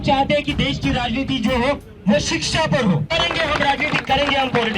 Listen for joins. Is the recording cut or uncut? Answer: cut